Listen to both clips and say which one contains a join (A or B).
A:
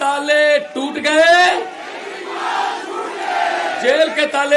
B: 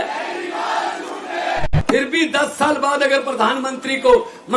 B